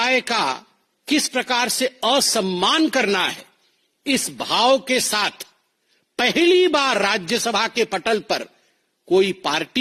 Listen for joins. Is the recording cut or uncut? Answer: uncut